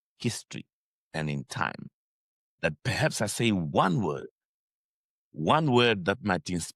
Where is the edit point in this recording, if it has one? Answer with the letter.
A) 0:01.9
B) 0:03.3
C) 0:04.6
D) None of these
D